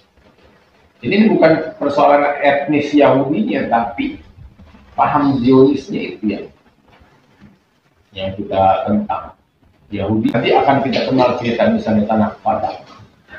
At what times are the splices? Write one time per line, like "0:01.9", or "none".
0:10.3